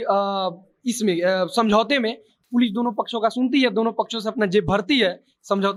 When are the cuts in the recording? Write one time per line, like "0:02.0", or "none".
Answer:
none